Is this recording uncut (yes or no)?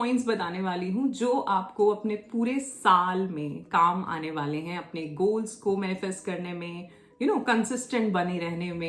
yes